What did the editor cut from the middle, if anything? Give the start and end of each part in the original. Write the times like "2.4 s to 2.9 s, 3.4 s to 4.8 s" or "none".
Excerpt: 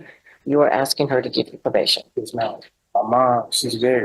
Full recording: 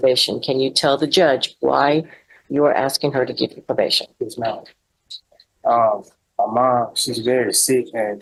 4.8 s to 6.2 s